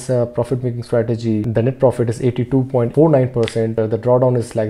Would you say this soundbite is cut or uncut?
cut